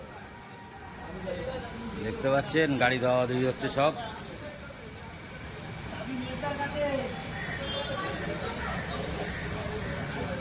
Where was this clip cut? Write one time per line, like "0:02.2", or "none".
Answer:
none